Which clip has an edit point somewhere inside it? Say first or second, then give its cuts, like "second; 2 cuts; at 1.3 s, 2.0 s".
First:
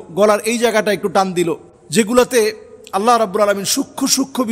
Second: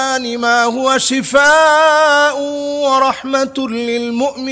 first; 1 cut; at 1.7 s